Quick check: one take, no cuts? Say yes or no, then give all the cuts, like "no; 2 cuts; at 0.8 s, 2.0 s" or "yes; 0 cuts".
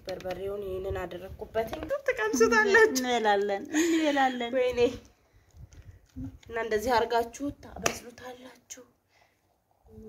no; 1 cut; at 1.8 s